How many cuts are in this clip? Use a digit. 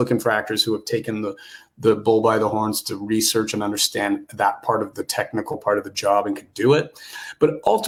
0